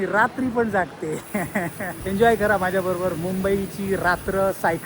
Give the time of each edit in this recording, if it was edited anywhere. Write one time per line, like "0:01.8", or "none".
0:02.0